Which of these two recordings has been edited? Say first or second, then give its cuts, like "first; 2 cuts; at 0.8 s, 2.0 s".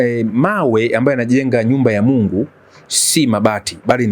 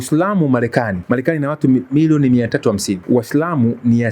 second; 2 cuts; at 1.0 s, 3.0 s